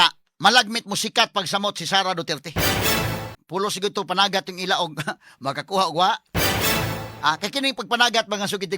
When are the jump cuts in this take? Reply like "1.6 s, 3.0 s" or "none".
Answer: 3.3 s